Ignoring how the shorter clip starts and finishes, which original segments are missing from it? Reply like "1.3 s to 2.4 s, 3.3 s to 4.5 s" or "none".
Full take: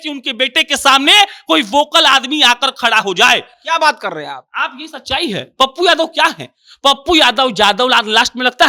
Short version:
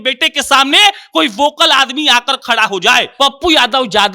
3.4 s to 6.7 s